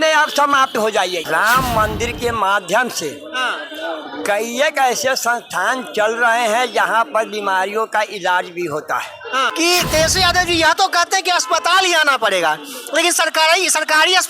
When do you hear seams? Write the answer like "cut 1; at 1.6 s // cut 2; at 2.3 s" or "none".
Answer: cut 1; at 1.2 s // cut 2; at 9.5 s